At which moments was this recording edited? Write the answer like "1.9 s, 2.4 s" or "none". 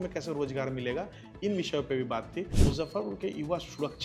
2.5 s